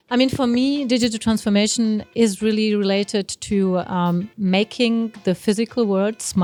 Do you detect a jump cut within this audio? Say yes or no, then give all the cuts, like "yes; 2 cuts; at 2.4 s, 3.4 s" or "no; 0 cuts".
no; 0 cuts